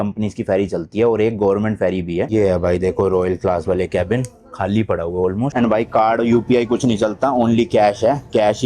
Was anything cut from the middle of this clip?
yes; 2 cuts; at 2.3 s, 5.5 s

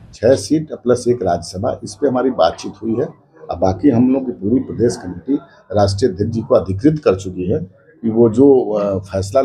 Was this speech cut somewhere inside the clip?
no; 0 cuts

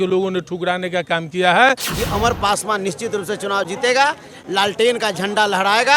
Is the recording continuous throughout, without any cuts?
no; 1 cut; at 1.9 s

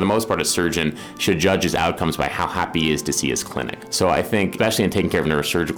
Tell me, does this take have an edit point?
yes; 2 cuts; at 3.8 s, 4.5 s

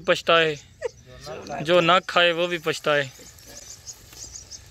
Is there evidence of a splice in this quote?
no; 0 cuts

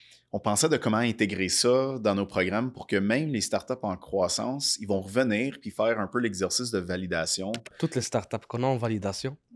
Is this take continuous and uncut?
no; 1 cut; at 7.8 s

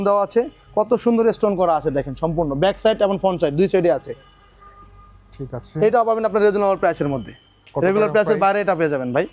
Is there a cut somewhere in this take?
no; 0 cuts

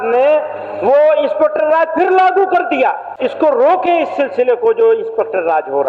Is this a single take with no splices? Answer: no; 1 cut; at 3.1 s

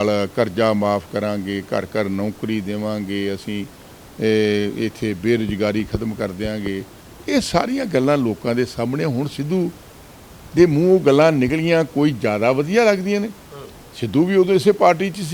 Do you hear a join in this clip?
no; 0 cuts

